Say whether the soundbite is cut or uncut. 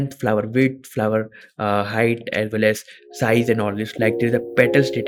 uncut